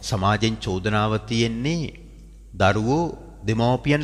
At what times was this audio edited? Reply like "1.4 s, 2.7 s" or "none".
none